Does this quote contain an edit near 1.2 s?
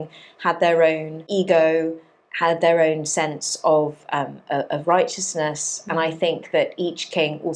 yes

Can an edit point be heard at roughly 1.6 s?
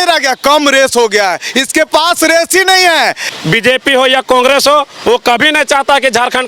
no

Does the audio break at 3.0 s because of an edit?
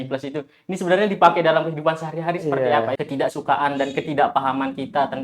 yes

